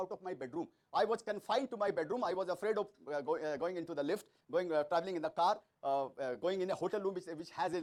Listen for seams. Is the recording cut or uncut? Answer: uncut